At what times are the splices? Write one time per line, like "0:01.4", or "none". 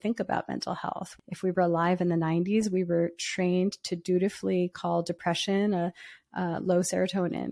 0:01.1